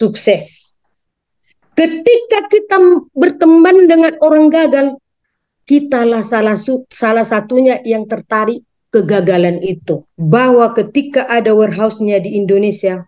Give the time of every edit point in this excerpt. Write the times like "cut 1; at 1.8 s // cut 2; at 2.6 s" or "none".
cut 1; at 10.1 s